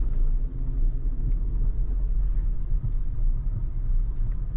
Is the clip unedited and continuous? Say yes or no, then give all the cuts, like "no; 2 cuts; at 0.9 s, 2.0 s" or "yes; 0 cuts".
yes; 0 cuts